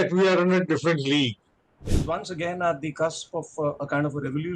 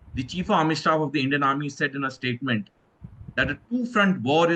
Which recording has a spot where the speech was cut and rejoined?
first; 1 cut; at 1.9 s

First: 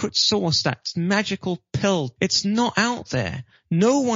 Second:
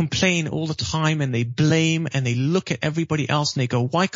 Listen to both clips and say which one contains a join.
first; 1 cut; at 2.1 s

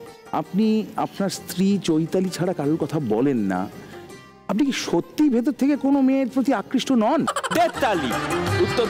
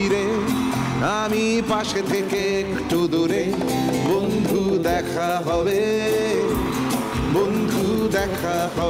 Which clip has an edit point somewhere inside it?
first; 1 cut; at 7.3 s

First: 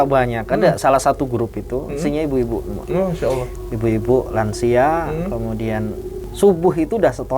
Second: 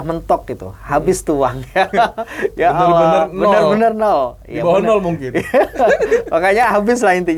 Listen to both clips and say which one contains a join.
first; 1 cut; at 6.1 s

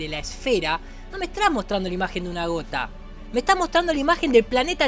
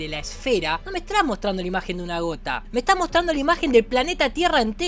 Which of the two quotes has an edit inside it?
second; 2 cuts; at 0.8 s, 2.6 s

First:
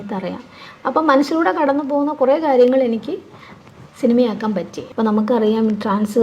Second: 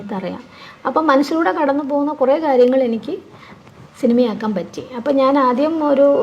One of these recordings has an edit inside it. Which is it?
first; 1 cut; at 4.8 s

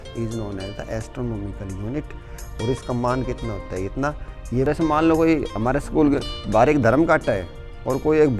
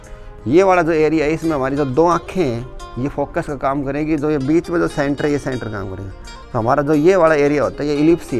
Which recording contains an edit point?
first; 1 cut; at 4.7 s

